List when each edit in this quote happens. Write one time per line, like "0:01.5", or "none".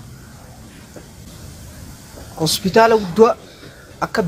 none